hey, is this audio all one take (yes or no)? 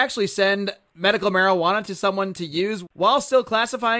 no